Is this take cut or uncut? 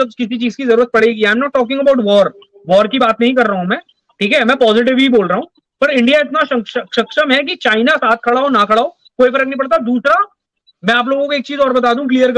uncut